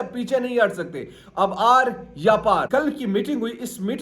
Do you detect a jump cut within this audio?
yes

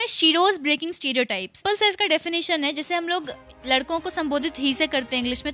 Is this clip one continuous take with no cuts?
no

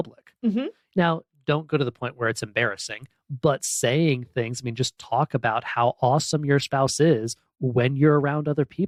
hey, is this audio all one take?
yes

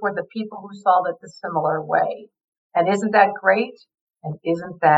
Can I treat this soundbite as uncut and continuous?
yes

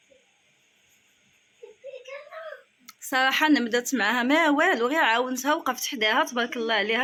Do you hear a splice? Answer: no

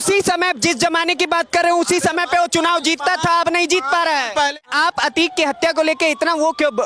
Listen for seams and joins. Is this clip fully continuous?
no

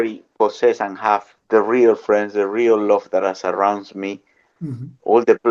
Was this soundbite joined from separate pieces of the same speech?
yes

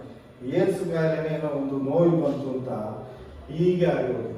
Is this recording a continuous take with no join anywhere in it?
yes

